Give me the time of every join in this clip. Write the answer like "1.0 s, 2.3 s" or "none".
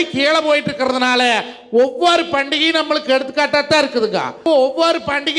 4.4 s